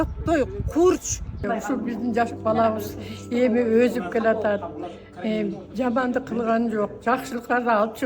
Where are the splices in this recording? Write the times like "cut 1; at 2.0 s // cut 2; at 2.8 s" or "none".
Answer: cut 1; at 1.4 s